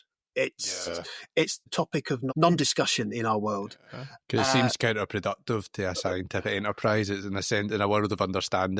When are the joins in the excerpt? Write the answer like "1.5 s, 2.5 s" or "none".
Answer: 1.7 s